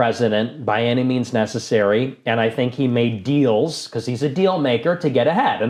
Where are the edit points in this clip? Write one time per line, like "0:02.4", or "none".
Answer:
none